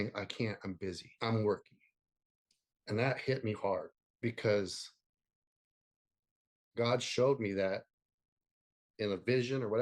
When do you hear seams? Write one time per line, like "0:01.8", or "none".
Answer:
0:01.1
0:08.9